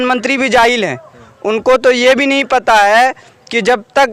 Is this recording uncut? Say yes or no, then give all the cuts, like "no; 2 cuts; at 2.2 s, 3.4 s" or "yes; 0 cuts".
yes; 0 cuts